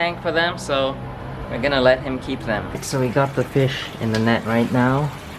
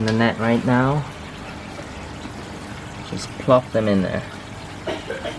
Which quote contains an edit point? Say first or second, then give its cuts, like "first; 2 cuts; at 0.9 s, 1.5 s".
first; 1 cut; at 2.7 s